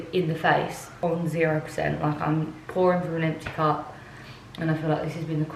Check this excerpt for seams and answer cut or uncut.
uncut